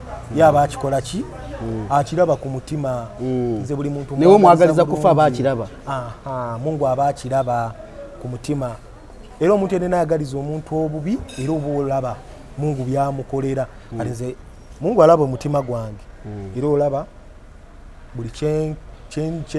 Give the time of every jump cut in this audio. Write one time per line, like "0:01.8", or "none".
none